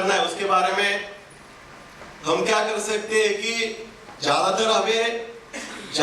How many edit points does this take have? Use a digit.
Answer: 0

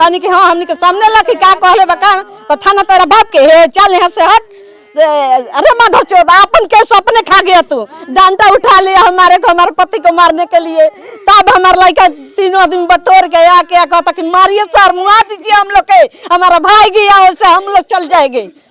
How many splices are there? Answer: 0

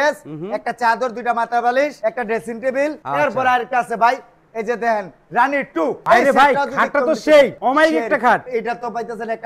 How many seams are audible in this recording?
3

